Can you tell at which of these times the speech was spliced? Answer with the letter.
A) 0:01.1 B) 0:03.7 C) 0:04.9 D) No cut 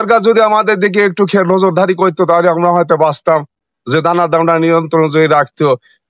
D